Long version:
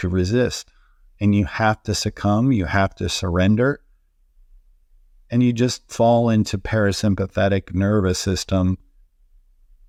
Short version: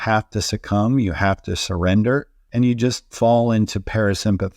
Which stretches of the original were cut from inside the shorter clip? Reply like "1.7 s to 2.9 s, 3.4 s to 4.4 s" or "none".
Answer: 3.9 s to 5.2 s